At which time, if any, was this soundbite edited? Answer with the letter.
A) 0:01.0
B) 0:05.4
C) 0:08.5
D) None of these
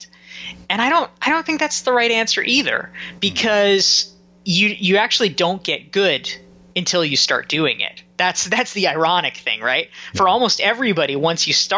D